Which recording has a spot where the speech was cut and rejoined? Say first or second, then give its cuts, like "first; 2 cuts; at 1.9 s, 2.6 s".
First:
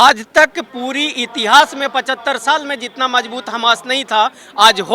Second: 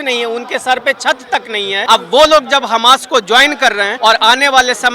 second; 2 cuts; at 1.8 s, 3.9 s